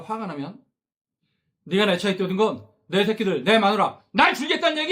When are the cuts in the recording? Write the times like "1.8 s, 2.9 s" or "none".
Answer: none